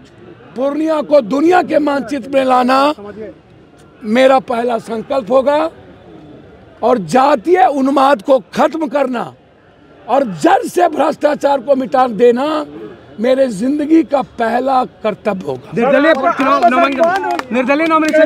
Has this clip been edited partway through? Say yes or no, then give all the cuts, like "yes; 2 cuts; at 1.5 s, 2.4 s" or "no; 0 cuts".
no; 0 cuts